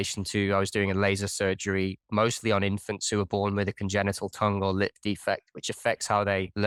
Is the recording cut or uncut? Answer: uncut